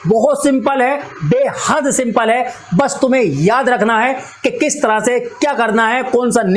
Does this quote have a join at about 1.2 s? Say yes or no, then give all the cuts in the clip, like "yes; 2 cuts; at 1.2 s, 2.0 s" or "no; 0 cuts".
no; 0 cuts